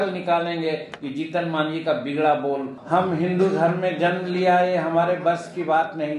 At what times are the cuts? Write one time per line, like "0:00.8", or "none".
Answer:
0:02.8